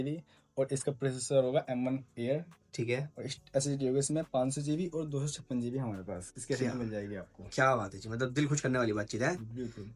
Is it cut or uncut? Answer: uncut